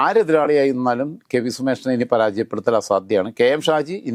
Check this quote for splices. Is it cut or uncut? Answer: uncut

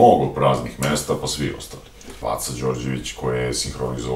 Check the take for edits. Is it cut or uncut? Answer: cut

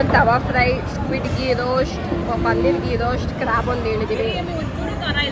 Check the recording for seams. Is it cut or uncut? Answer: uncut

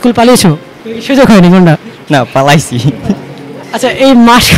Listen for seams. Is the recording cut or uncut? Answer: uncut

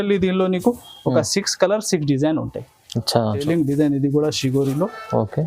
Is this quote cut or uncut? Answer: cut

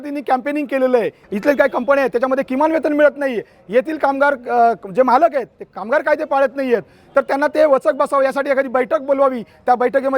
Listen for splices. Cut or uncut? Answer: cut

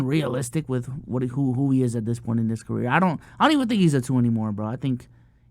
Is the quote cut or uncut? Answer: uncut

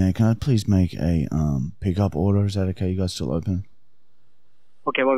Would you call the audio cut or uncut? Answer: uncut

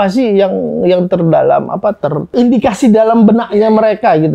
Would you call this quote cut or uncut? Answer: uncut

